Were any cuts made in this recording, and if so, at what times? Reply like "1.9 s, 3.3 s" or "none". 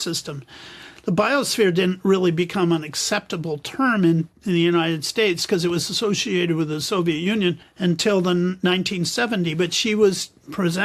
7.7 s